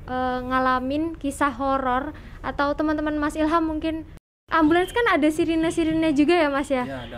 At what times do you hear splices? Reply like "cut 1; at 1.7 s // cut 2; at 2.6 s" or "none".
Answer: cut 1; at 4.3 s